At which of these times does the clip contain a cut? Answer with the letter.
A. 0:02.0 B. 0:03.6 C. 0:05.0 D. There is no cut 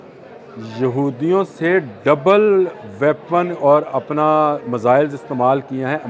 D